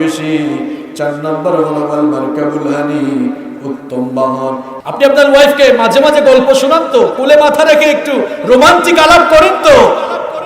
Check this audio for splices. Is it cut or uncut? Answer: cut